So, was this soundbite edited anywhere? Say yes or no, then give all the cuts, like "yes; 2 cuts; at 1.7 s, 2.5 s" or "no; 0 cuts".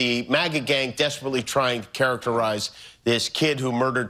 no; 0 cuts